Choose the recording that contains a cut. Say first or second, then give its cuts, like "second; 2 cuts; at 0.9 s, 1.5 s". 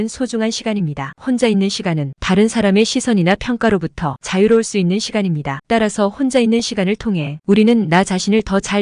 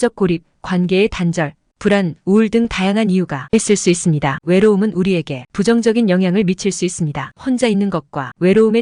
first; 2 cuts; at 5.6 s, 7.4 s